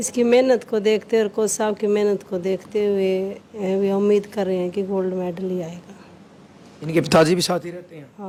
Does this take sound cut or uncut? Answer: uncut